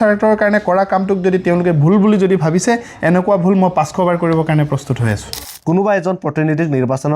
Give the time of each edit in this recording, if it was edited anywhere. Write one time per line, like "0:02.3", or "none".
0:05.5